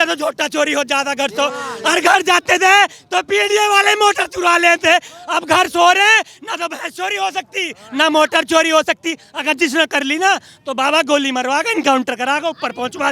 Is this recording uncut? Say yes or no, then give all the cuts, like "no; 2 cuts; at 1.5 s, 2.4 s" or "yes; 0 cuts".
yes; 0 cuts